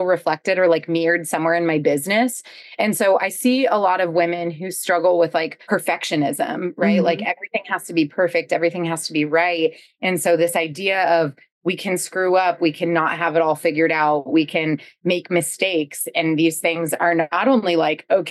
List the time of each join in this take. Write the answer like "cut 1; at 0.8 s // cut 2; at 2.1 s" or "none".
cut 1; at 5.6 s